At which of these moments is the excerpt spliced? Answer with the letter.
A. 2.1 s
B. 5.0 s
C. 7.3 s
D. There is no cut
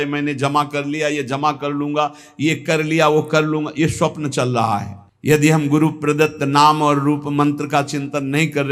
B